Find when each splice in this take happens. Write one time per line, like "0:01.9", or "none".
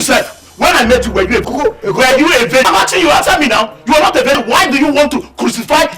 0:01.5
0:02.7
0:04.4